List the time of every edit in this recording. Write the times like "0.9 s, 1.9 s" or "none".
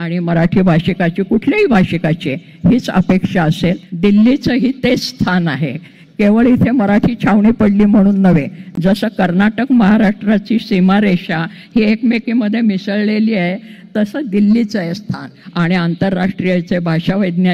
3.9 s, 15.4 s